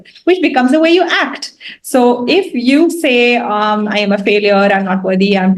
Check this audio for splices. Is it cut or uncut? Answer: uncut